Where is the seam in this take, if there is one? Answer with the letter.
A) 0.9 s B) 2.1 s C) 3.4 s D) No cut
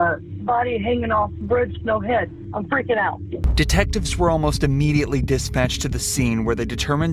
C